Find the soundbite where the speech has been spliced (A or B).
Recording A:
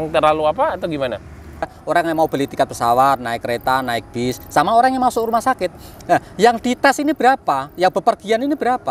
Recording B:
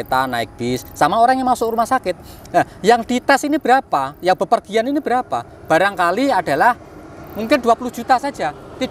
A